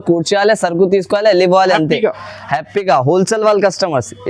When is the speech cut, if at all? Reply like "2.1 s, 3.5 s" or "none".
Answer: none